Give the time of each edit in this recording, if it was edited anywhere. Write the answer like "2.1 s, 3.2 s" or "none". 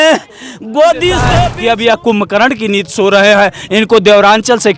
1.4 s